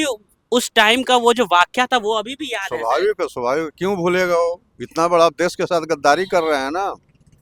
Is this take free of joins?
yes; 0 cuts

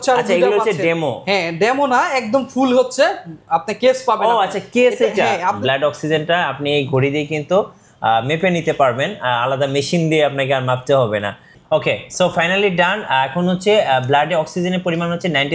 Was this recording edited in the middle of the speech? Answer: yes; 2 cuts; at 5.6 s, 11.5 s

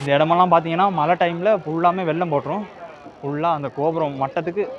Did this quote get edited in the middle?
no; 0 cuts

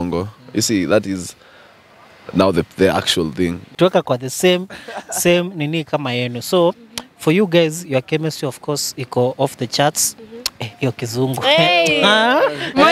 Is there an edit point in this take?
yes; 1 cut; at 3.7 s

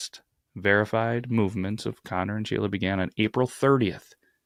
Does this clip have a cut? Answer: no; 0 cuts

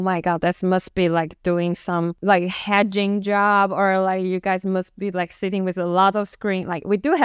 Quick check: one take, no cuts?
no; 1 cut; at 2.2 s

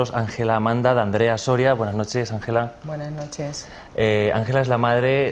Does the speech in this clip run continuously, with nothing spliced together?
no; 1 cut; at 2.4 s

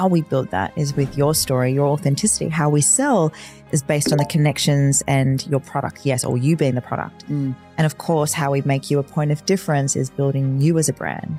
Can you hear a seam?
no; 0 cuts

